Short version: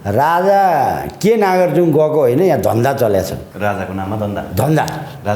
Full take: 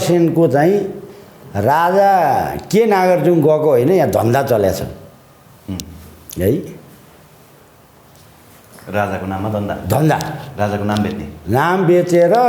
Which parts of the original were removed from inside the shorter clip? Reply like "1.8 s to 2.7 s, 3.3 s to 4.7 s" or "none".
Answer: 4.9 s to 8.8 s